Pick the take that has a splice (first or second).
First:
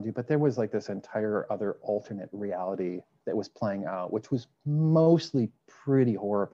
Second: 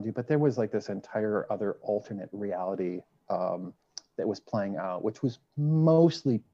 first